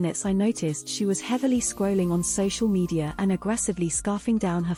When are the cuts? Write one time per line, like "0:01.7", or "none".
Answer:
none

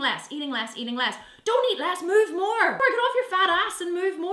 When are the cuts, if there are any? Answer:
0:02.8

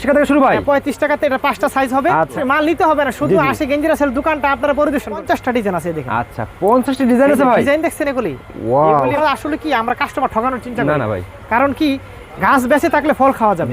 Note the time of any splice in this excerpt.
0:02.3
0:05.2
0:09.2

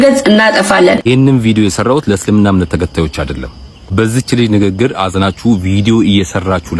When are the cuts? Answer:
0:01.0

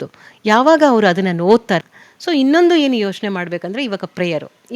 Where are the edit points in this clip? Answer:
0:01.9

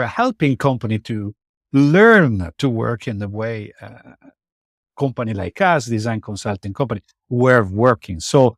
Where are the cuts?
none

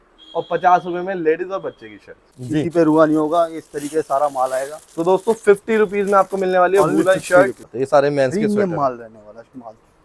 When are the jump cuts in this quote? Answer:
0:02.3
0:07.7

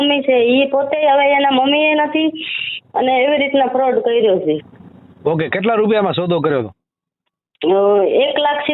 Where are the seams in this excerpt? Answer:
none

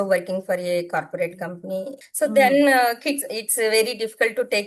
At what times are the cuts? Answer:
0:02.0

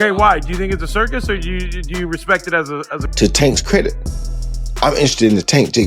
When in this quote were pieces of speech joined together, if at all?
0:03.1

